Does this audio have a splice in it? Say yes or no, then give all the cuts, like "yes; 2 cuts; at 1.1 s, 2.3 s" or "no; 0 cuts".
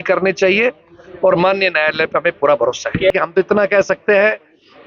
yes; 1 cut; at 3.1 s